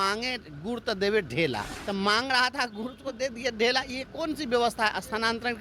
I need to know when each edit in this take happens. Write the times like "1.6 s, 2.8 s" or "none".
1.7 s